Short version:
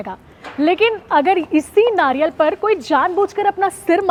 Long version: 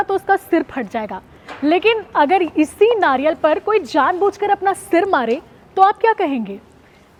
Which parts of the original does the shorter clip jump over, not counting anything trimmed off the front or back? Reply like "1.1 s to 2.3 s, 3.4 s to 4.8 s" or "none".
none